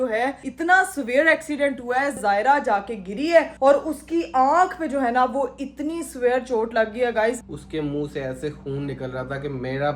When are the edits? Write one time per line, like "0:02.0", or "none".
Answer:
0:02.2
0:07.4